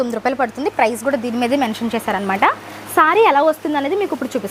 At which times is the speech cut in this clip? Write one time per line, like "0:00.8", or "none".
none

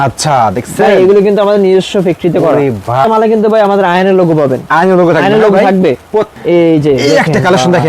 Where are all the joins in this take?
0:03.0
0:06.3

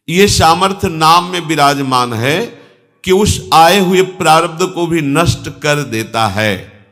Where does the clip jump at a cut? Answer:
none

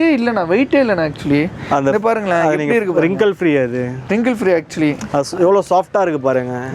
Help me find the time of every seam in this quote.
none

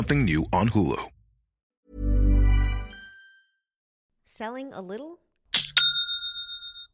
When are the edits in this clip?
none

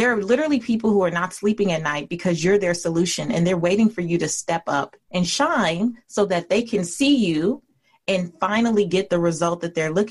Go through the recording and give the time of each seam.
0:05.0

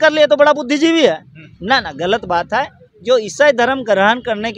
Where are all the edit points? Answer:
none

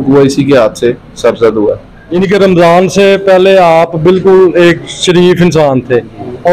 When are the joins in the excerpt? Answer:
0:01.9

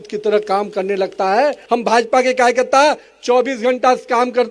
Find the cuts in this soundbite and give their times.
0:01.6

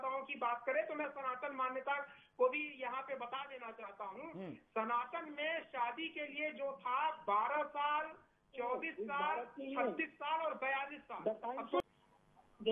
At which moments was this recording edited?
0:11.8

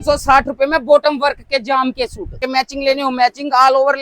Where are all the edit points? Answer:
0:02.4

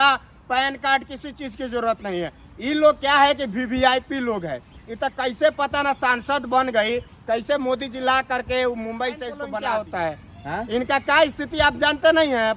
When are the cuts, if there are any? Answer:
0:09.4

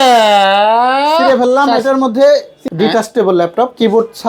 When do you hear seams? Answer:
0:02.6

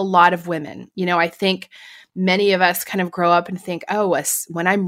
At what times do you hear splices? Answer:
none

